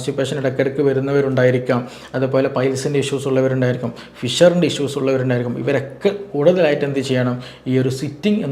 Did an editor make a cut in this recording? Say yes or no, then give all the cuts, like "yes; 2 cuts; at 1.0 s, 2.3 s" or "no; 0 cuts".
no; 0 cuts